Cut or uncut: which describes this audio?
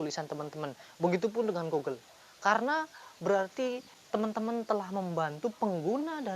cut